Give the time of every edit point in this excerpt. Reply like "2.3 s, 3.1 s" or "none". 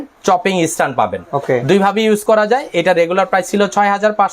none